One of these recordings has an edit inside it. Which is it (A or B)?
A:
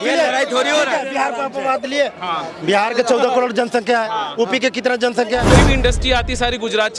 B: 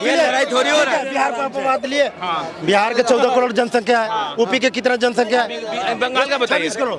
A